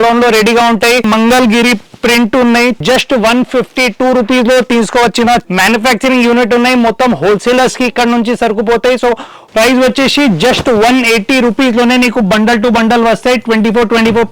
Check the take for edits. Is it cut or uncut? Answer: cut